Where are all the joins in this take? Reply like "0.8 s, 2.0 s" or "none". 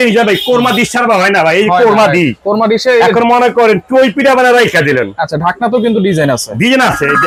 none